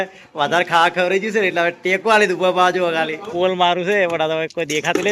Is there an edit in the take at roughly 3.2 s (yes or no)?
yes